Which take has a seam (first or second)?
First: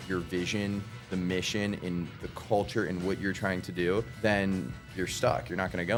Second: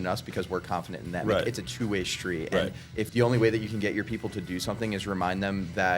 second